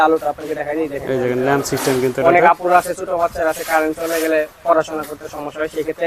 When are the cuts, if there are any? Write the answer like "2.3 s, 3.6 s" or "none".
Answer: none